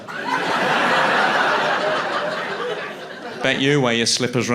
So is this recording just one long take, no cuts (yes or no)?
yes